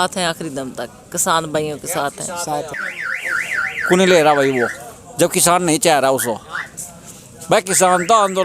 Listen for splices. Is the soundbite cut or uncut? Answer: uncut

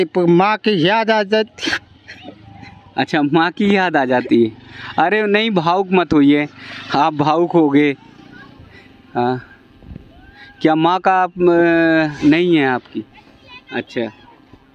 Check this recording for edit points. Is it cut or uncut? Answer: uncut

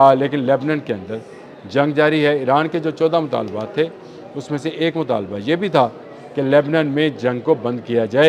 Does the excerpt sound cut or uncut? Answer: uncut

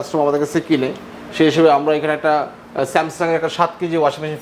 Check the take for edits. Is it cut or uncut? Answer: uncut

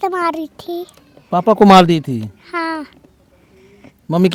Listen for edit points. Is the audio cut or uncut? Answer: uncut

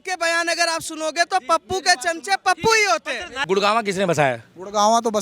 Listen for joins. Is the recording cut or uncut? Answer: cut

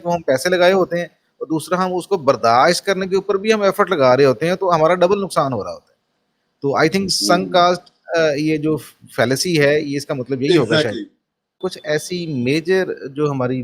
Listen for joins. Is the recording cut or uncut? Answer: cut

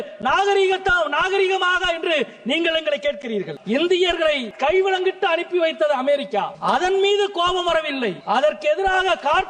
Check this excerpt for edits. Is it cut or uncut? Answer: cut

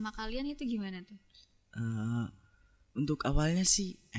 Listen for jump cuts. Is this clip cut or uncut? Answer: uncut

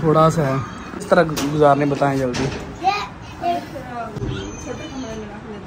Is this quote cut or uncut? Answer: cut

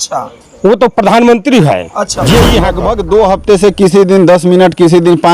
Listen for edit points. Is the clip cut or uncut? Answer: cut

